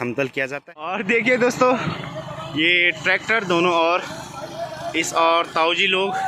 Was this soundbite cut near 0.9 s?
yes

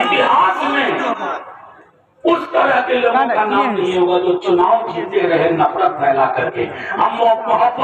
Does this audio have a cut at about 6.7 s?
no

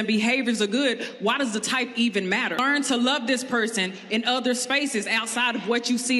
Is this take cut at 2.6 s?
yes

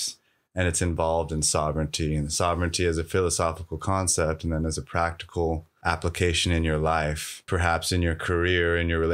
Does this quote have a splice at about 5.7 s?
yes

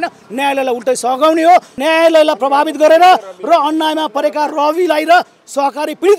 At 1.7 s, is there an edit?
yes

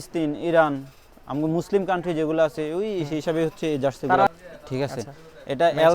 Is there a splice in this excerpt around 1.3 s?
no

